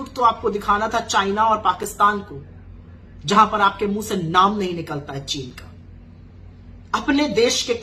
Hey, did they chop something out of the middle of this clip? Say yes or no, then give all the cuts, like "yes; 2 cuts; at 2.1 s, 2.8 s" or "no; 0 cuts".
no; 0 cuts